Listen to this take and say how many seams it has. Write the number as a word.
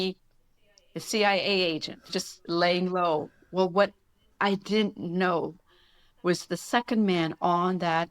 one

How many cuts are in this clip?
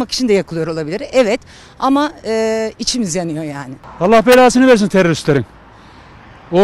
one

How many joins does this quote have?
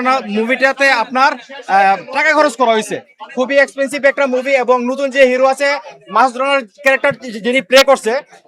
zero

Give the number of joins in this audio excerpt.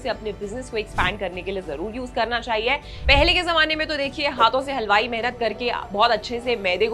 one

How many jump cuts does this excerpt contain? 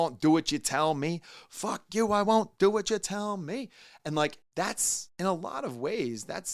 zero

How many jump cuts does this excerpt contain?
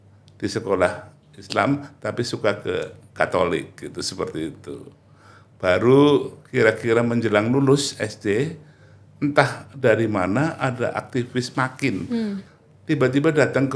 one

